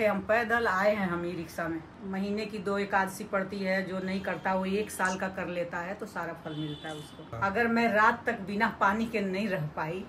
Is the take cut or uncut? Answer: cut